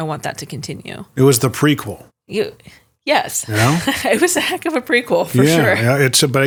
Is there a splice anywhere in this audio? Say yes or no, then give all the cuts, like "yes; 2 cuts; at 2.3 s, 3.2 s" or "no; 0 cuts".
no; 0 cuts